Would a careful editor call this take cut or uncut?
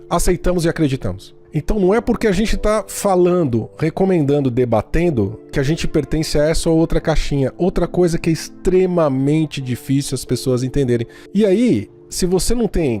cut